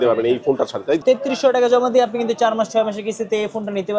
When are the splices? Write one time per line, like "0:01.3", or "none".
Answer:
0:01.0